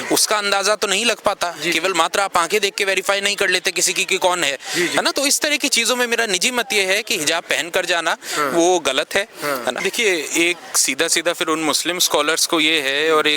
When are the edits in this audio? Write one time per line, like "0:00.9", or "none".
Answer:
0:09.8